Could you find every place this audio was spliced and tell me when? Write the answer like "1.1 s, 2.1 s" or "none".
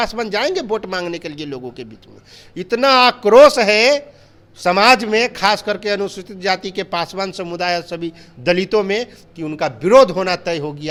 none